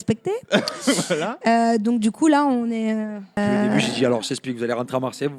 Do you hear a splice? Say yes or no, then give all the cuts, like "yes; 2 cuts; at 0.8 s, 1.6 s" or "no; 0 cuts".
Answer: yes; 1 cut; at 3.4 s